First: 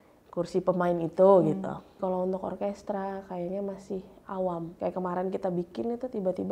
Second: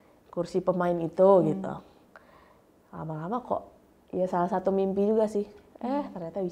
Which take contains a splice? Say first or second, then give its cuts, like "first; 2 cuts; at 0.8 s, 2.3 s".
first; 2 cuts; at 2.0 s, 4.7 s